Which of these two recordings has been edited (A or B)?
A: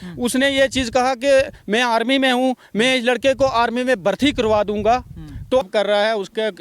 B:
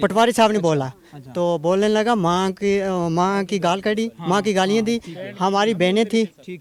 A